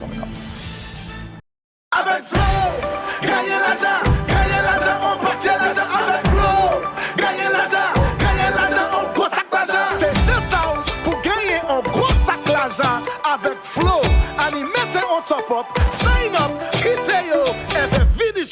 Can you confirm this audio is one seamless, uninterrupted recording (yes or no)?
no